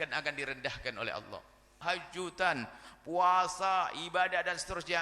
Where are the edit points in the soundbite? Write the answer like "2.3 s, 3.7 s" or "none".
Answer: 1.8 s